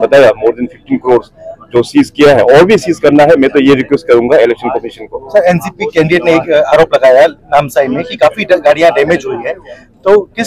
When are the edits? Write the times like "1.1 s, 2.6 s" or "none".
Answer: none